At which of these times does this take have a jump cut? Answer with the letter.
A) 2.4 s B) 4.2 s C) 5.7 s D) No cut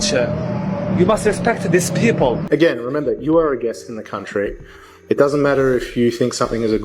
A